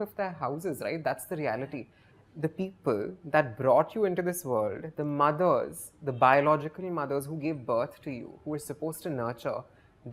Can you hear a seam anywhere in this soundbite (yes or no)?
no